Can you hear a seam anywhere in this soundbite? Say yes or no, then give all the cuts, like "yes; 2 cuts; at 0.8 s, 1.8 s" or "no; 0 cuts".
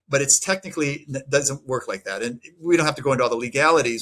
no; 0 cuts